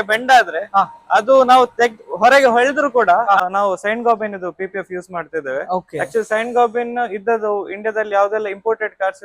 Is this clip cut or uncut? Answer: cut